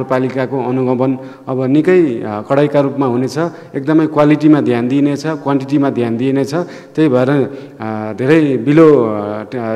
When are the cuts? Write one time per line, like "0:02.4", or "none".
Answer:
none